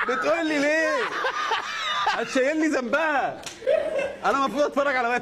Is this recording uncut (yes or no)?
yes